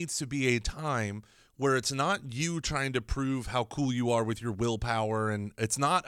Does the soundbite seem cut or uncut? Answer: uncut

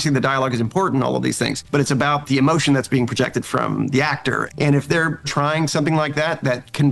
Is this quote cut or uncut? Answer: cut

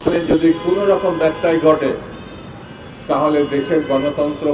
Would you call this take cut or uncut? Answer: uncut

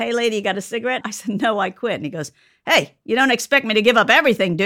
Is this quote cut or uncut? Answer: cut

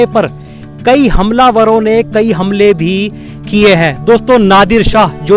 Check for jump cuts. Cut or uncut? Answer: uncut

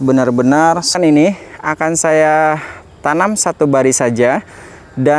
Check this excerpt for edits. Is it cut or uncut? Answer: cut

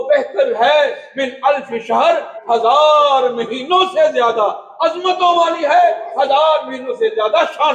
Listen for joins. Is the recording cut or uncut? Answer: uncut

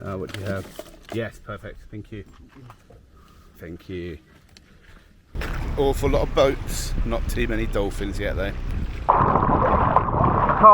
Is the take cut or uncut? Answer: cut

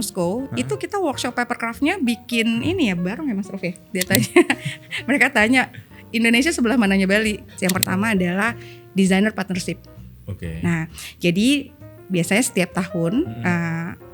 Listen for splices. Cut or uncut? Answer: cut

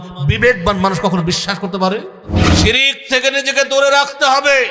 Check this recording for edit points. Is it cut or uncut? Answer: cut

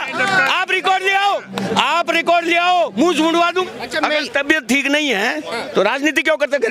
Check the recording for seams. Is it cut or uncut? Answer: cut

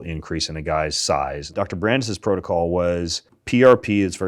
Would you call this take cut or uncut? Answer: cut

